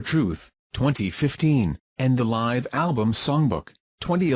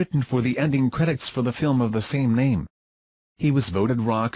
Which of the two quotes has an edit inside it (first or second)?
second